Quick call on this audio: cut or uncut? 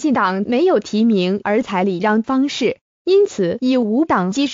uncut